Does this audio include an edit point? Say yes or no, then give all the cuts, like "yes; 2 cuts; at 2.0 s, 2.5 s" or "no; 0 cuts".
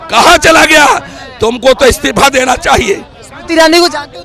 no; 0 cuts